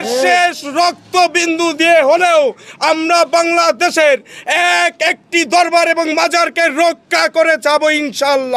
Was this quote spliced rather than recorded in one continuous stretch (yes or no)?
no